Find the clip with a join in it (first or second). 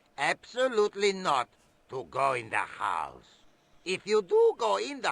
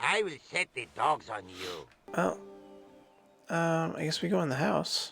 second